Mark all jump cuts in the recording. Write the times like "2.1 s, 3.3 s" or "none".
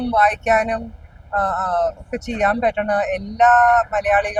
none